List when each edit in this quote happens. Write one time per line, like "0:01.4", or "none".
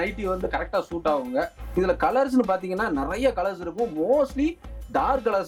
0:01.6